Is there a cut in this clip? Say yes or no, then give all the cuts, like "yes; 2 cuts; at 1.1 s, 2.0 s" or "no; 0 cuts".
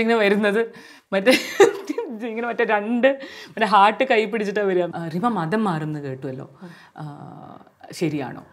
yes; 1 cut; at 4.9 s